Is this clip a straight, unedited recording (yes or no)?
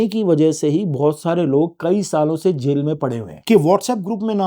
no